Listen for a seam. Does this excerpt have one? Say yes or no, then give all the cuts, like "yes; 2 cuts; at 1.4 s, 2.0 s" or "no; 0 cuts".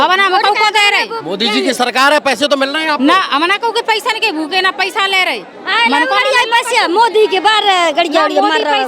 no; 0 cuts